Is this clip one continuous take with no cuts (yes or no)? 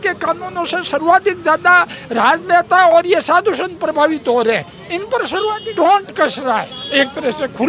no